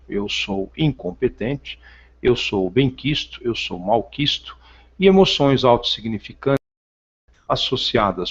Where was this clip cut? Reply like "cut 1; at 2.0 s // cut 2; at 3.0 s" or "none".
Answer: cut 1; at 3.0 s